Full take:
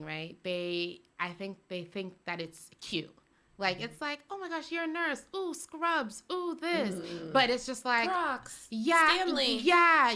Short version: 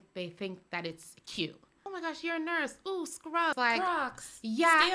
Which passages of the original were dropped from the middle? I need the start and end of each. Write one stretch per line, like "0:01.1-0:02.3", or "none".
0:03.3-0:04.3
0:06.0-0:07.8

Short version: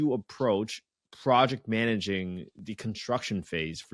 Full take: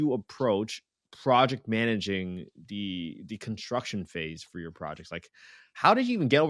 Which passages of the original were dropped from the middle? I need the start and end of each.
0:02.6-0:03.2

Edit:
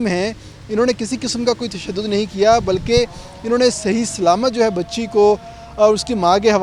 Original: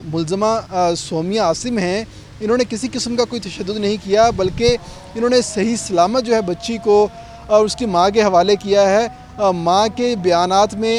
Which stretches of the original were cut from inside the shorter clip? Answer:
none

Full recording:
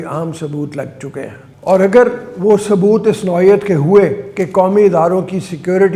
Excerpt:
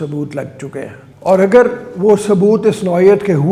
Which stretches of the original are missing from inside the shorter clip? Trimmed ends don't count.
none

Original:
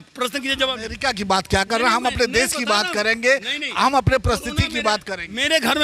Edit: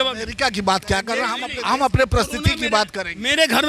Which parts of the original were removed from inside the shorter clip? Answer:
0:02.0-0:03.5

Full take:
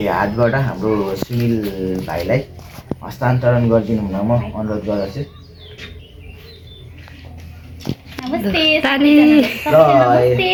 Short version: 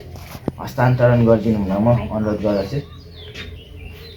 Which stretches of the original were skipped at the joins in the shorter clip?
none

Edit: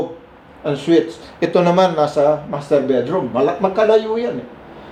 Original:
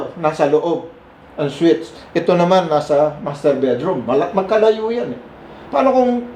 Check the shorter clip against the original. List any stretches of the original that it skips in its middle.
none

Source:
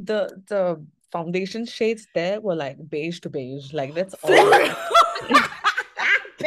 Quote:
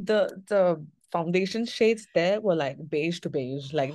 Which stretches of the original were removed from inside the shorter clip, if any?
none

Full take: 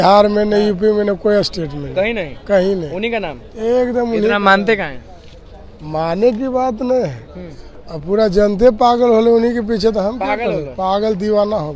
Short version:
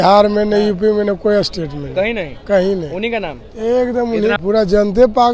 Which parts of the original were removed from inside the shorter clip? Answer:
0:04.4-0:08.0

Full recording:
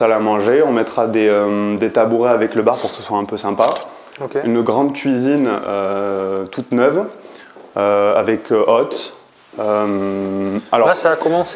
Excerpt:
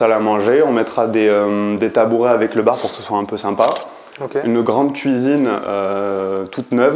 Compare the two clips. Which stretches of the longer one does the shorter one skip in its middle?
none

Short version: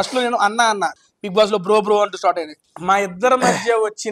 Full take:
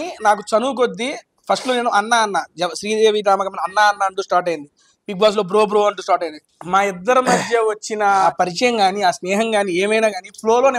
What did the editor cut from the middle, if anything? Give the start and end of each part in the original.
0:02.5-0:04.8

